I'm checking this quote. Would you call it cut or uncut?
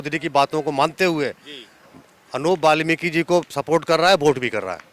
uncut